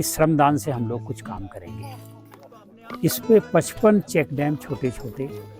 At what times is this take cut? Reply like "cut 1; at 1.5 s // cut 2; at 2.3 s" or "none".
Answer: none